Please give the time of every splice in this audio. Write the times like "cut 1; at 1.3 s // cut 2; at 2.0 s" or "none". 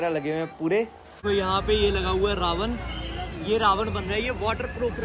cut 1; at 1.3 s